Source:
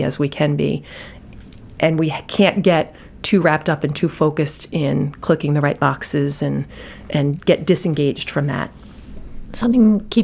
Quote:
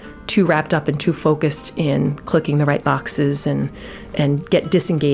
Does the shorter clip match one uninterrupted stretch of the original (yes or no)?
yes